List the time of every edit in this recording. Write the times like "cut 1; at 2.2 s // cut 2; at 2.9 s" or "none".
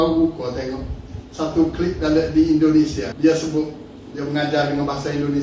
cut 1; at 3.1 s